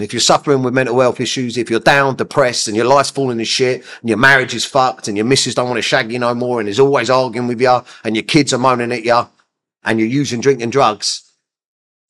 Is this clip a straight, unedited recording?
yes; 0 cuts

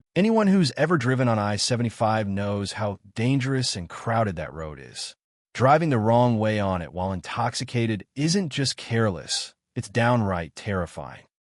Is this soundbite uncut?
yes; 0 cuts

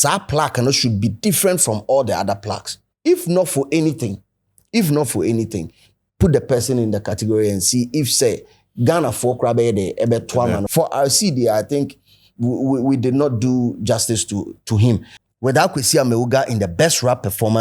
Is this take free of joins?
no; 3 cuts; at 2.9 s, 10.7 s, 15.1 s

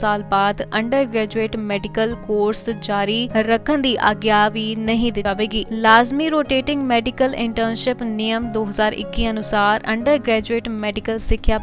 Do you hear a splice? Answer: yes; 1 cut; at 5.2 s

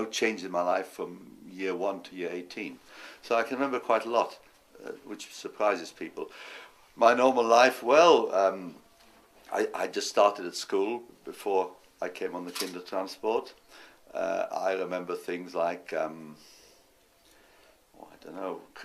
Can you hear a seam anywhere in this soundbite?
no; 0 cuts

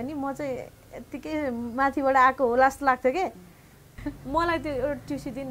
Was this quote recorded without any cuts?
no; 1 cut; at 4.0 s

